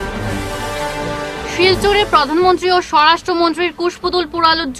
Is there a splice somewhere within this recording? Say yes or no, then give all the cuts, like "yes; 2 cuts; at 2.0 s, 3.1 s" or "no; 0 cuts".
yes; 1 cut; at 1.1 s